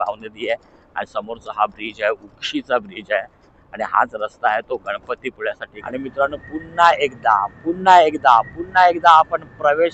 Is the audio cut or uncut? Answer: cut